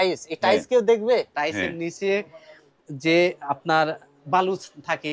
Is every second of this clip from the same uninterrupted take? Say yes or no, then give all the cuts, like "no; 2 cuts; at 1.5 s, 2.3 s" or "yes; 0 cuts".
no; 1 cut; at 1.3 s